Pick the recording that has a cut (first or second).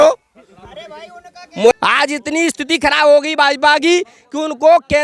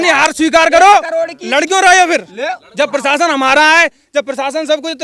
first